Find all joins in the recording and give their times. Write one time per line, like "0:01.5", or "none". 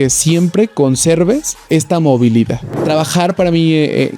0:01.5
0:02.8